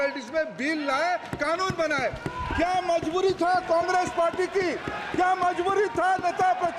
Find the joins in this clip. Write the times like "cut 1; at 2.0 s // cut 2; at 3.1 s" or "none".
none